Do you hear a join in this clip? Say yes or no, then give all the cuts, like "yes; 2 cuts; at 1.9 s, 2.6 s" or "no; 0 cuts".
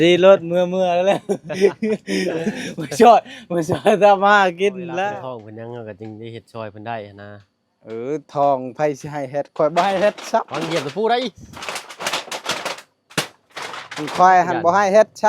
yes; 1 cut; at 5.2 s